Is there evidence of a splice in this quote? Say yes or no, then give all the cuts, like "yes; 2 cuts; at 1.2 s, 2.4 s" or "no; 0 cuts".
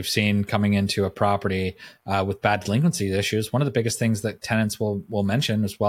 no; 0 cuts